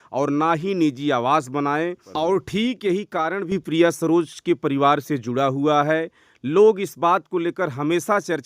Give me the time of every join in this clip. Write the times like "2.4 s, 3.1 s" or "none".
2.0 s